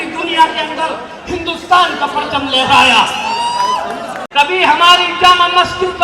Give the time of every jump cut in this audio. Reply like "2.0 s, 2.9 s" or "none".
4.1 s